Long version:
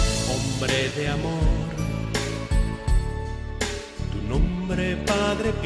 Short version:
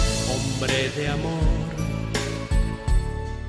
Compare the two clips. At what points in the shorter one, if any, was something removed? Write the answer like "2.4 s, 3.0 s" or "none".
none